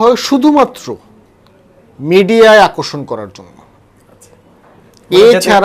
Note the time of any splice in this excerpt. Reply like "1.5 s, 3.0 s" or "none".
none